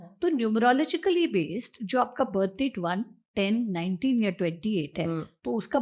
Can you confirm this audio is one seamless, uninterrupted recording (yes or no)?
yes